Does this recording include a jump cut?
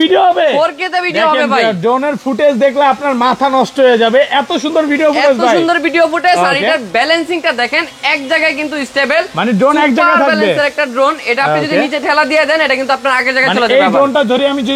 no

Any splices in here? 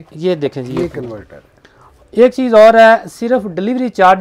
no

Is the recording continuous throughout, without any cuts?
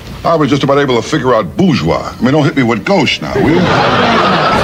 yes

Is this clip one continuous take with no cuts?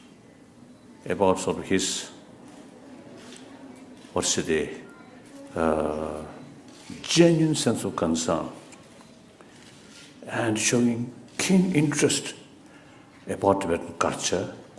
no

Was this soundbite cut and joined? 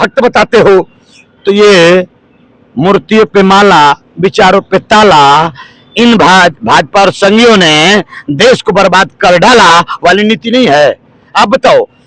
no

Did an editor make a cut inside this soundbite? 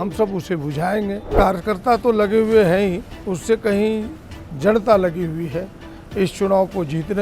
yes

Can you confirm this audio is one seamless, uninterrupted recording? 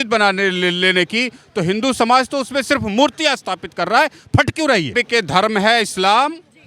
no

